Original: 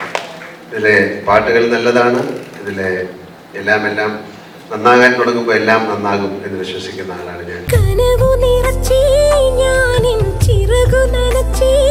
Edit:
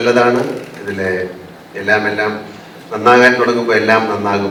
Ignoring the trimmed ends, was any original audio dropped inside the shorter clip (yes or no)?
no